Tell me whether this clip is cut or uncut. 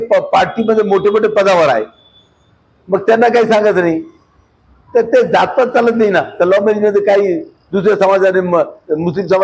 uncut